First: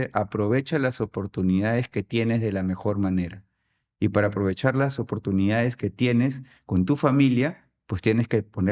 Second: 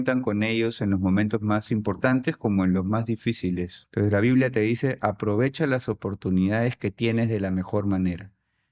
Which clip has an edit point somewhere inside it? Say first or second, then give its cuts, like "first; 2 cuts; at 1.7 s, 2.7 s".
second; 1 cut; at 3.8 s